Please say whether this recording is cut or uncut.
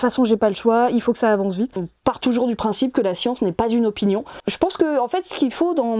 cut